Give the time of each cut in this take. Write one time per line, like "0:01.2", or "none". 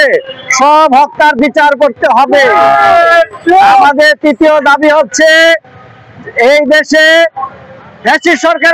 none